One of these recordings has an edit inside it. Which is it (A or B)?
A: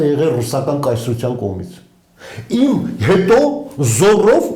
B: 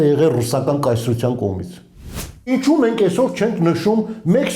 B